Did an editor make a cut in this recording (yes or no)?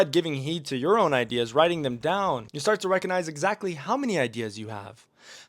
yes